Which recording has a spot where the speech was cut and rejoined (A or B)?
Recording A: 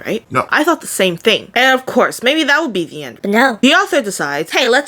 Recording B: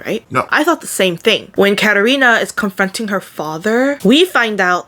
A